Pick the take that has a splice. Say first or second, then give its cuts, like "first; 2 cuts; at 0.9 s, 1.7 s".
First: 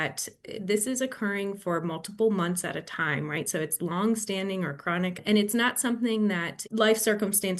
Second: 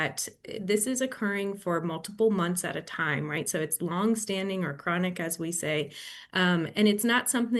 first; 2 cuts; at 5.2 s, 6.5 s